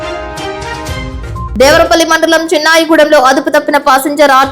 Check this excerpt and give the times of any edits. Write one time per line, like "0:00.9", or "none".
0:01.0